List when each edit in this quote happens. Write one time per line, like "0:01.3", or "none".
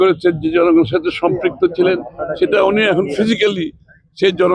none